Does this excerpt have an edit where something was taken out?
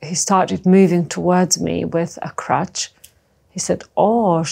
no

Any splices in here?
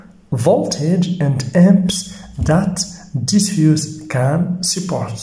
no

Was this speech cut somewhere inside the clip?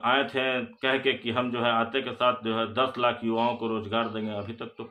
no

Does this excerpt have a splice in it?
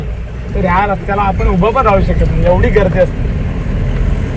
no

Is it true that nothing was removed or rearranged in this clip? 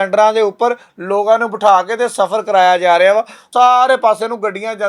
no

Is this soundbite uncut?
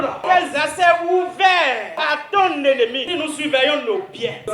no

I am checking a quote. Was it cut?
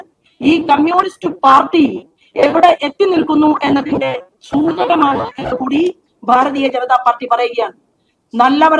no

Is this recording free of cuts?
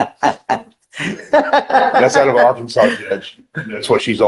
yes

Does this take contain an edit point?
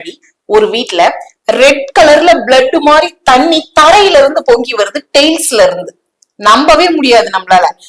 no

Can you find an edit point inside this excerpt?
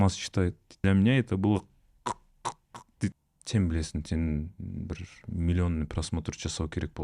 yes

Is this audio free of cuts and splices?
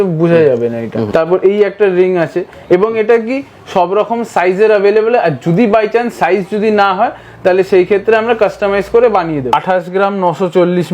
no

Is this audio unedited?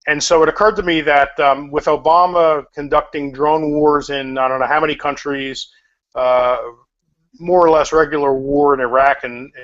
no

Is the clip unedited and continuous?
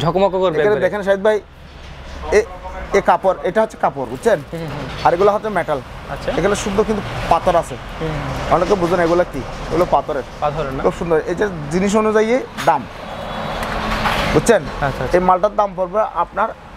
yes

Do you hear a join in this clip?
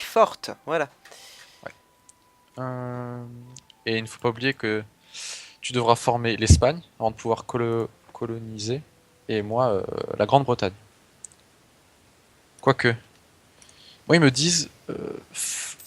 no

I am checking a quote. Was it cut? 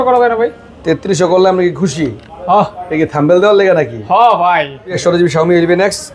yes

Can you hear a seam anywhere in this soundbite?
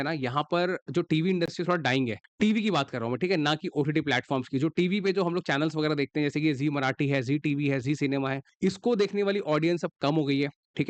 no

